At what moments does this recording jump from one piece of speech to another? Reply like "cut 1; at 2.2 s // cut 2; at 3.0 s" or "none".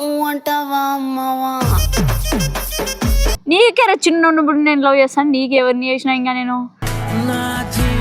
cut 1; at 3.4 s

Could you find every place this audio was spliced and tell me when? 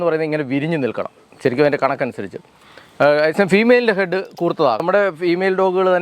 cut 1; at 4.8 s

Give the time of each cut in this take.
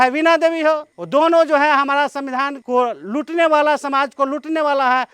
cut 1; at 0.9 s // cut 2; at 2.6 s

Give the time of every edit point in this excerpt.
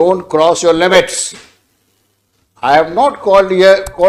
none

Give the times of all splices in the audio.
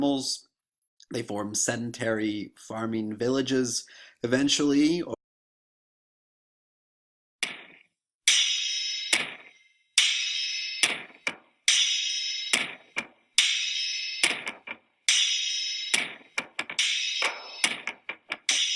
none

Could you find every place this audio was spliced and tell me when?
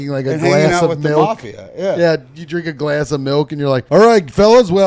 cut 1; at 3.8 s

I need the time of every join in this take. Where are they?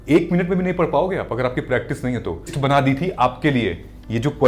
cut 1; at 2.5 s

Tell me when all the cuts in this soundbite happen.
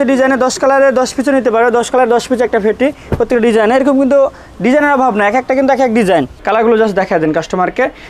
cut 1; at 6.4 s

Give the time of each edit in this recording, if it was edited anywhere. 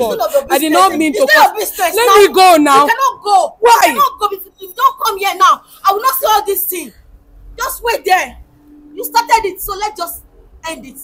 none

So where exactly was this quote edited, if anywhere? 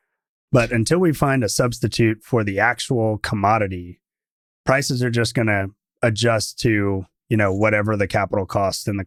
none

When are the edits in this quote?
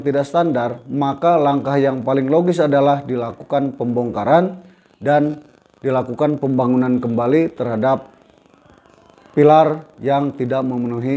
none

